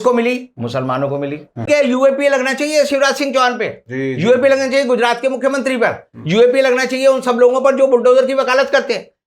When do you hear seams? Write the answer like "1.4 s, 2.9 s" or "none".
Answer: 1.7 s